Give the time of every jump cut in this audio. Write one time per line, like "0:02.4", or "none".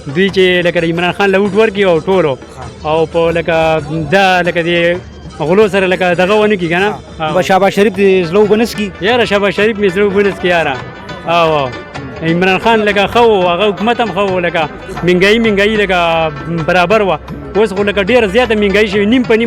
none